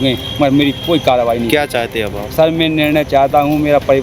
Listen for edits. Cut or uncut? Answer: uncut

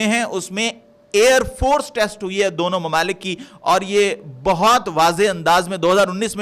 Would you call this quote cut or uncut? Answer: uncut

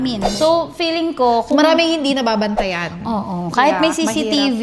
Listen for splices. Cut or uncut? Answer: uncut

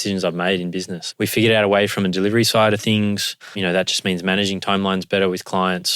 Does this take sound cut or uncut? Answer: cut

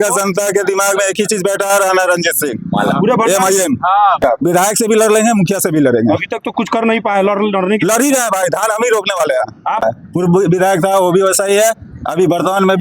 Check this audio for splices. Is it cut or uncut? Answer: cut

